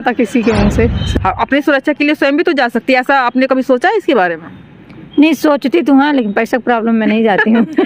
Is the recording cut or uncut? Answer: cut